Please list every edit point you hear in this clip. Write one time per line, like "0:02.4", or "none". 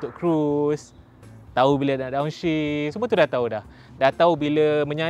0:02.9